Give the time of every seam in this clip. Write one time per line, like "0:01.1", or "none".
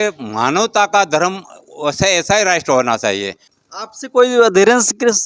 0:03.4